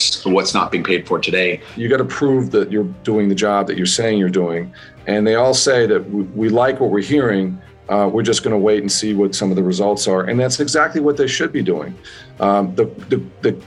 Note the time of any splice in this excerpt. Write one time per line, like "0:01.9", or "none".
0:01.8